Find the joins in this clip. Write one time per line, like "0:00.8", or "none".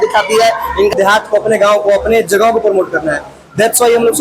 0:00.9